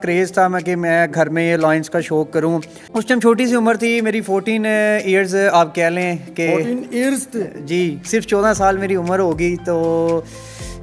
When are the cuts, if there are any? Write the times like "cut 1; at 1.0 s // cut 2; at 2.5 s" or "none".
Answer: cut 1; at 2.8 s